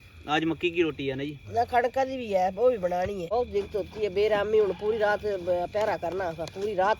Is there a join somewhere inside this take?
yes; 1 cut; at 3.3 s

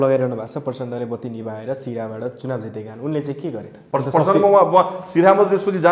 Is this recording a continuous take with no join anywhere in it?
no; 1 cut; at 3.7 s

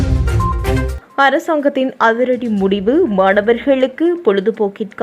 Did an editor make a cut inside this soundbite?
yes; 1 cut; at 0.9 s

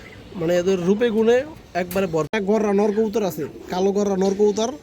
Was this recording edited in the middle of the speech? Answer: yes; 1 cut; at 2.3 s

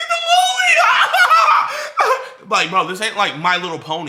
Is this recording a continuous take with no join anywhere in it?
yes; 0 cuts

